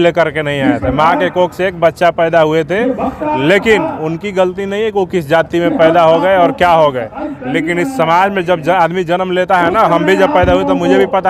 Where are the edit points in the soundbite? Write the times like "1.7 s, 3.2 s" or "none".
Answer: none